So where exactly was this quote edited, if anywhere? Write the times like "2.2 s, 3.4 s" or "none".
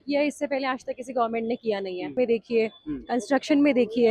2.1 s